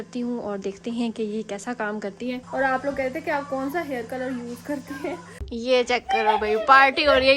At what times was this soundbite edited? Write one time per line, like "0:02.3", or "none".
0:02.4
0:05.3